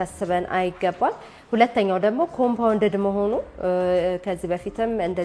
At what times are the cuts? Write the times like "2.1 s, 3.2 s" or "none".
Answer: none

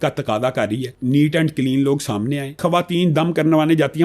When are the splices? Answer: 0.9 s, 2.6 s

